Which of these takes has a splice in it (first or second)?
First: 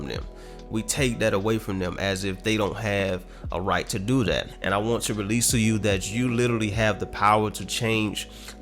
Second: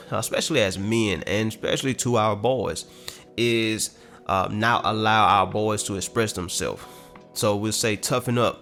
first